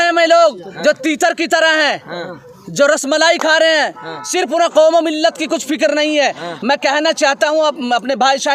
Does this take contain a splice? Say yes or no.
no